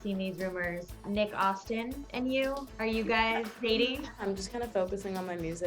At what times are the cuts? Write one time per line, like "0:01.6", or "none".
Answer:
0:01.0
0:02.0
0:02.7
0:03.5
0:04.2